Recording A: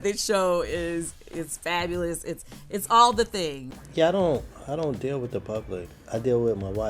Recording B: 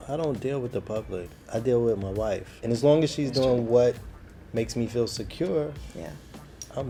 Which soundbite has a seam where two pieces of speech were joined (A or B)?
A